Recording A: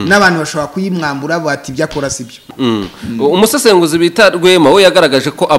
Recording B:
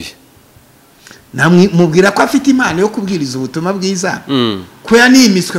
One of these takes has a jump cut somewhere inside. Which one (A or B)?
A